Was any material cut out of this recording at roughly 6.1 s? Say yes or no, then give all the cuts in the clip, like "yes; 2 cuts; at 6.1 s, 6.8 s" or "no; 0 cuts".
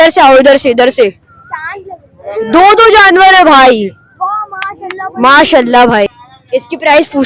yes; 1 cut; at 6.1 s